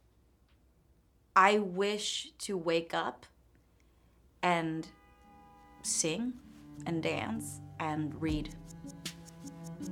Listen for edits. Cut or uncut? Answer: uncut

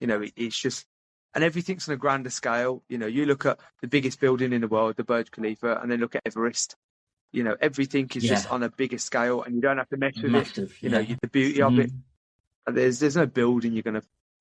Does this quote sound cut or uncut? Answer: uncut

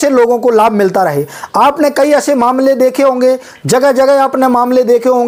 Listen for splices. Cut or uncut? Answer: uncut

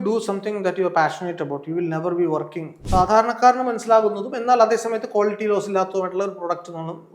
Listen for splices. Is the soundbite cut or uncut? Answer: cut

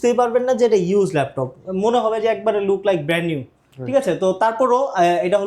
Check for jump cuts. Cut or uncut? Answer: uncut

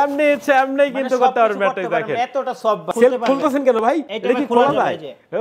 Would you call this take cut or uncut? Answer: cut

